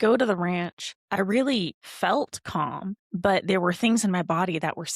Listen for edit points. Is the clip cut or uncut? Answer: uncut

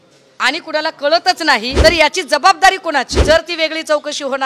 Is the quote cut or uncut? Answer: cut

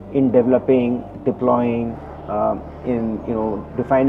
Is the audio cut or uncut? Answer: uncut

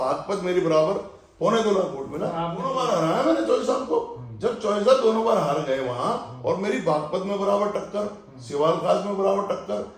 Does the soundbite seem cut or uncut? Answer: cut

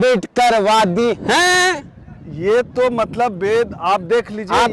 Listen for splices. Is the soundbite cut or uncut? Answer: uncut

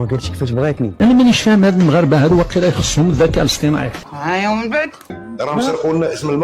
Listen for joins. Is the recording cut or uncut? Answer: cut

